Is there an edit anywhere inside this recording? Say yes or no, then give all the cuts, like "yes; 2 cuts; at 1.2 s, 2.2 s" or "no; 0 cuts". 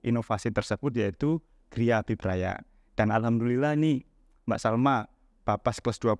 no; 0 cuts